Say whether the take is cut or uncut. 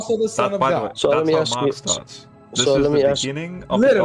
cut